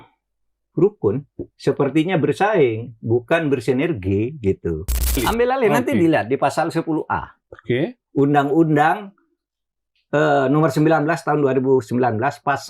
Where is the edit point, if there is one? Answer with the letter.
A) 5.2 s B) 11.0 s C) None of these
A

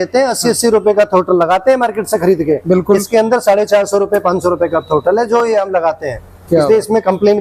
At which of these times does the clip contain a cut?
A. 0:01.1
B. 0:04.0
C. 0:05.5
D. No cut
D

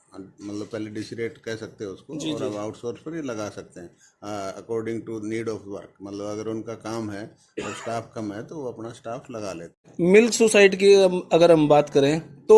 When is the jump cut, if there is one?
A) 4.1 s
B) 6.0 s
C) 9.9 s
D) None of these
C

